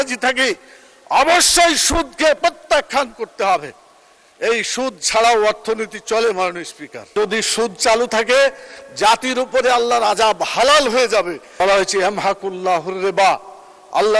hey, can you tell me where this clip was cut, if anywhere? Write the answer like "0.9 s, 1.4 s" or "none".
7.1 s, 11.4 s